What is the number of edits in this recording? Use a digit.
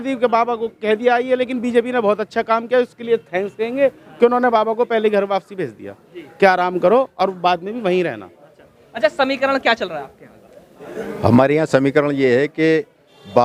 0